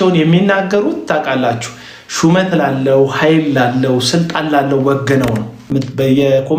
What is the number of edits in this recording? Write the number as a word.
one